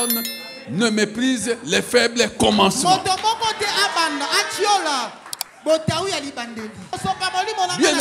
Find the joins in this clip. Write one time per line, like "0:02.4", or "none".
0:06.9